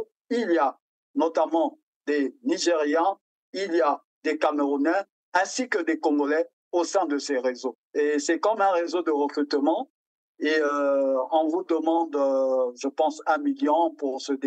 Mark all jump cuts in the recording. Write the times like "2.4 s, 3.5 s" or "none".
7.8 s